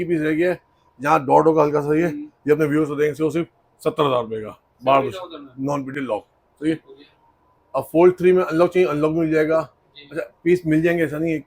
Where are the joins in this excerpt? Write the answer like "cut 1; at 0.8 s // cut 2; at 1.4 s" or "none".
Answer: none